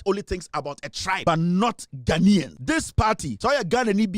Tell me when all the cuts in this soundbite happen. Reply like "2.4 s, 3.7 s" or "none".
1.2 s, 3.1 s